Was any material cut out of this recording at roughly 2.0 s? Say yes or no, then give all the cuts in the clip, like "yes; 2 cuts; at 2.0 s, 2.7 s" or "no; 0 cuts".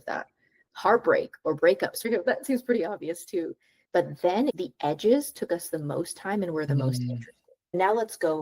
yes; 2 cuts; at 2.0 s, 7.7 s